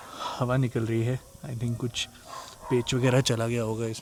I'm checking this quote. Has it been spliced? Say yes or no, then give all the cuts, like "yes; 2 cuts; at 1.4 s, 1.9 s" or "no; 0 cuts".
no; 0 cuts